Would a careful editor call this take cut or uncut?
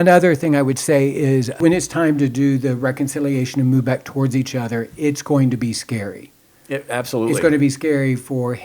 cut